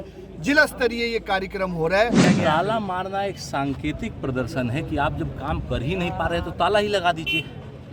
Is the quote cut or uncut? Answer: cut